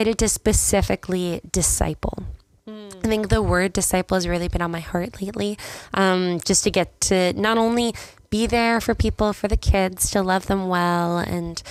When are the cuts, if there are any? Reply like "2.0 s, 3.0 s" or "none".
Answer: none